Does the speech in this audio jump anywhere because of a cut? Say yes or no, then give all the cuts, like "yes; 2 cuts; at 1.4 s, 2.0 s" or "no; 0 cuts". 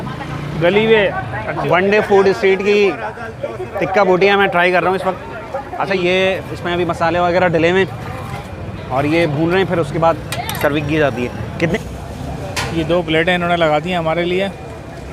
yes; 3 cuts; at 1.6 s, 6.0 s, 11.8 s